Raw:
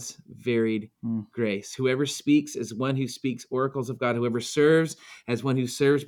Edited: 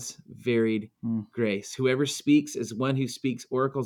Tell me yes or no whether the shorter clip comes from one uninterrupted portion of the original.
yes